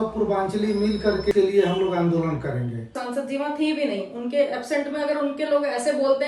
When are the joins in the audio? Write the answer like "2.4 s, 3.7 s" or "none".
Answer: 1.3 s, 3.0 s